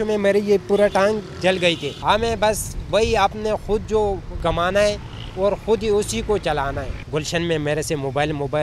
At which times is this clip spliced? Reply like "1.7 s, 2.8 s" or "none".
1.9 s, 4.3 s, 6.9 s